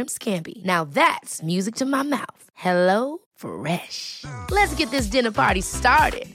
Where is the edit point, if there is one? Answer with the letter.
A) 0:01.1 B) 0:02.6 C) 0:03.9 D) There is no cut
D